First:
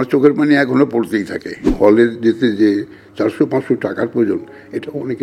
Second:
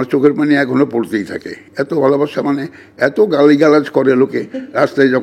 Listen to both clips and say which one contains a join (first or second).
first